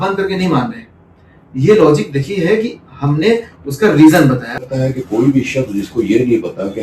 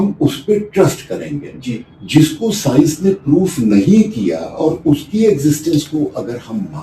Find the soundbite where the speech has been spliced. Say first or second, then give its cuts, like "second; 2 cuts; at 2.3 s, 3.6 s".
first; 1 cut; at 4.6 s